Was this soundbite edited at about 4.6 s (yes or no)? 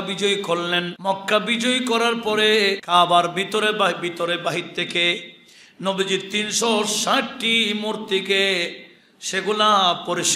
no